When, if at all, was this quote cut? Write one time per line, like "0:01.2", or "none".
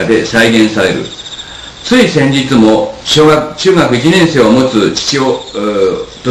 0:01.5